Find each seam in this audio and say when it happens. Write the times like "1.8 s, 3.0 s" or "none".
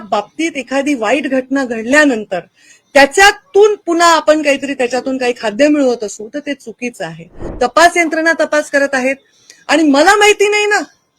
7.4 s